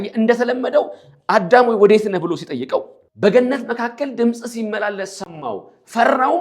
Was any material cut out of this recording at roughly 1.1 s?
no; 1 cut; at 3.0 s

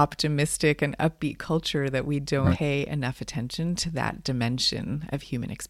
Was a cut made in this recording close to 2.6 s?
yes; 1 cut; at 2.6 s

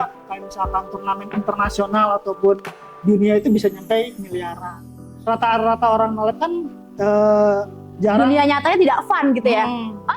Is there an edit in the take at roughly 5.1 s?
yes; 1 cut; at 5.1 s

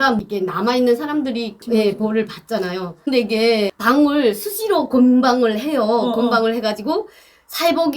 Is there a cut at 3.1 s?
yes; 1 cut; at 3.1 s

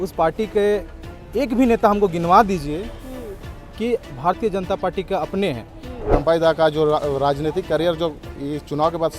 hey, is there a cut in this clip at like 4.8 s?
no; 1 cut; at 6.1 s

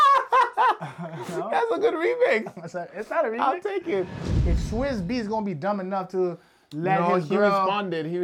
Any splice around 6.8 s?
no; 1 cut; at 4.2 s

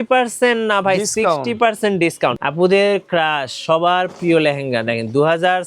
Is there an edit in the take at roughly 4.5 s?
no; 1 cut; at 2.3 s

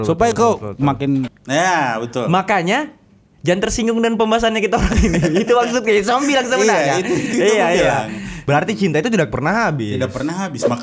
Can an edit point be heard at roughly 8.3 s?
yes; 2 cuts; at 1.3 s, 8.3 s

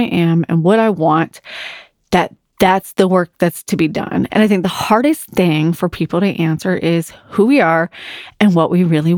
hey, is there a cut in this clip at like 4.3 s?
yes; 1 cut; at 4.3 s

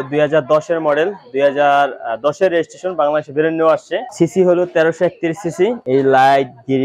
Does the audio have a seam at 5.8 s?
yes; 2 cuts; at 4.1 s, 5.8 s

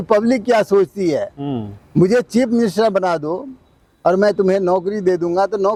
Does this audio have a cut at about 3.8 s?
no; 0 cuts

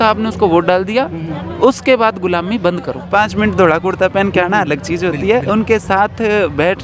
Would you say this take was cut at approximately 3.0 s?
yes; 1 cut; at 3.0 s

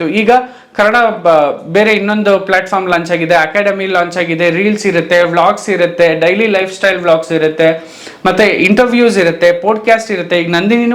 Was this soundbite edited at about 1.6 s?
no; 0 cuts

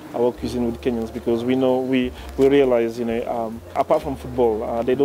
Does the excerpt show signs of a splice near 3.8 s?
yes; 1 cut; at 3.8 s

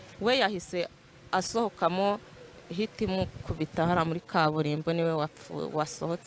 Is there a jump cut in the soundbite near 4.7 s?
no; 0 cuts

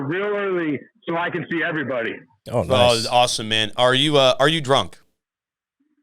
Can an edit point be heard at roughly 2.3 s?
no; 0 cuts

